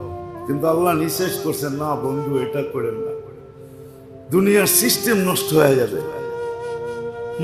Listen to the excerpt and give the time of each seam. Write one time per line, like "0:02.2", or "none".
none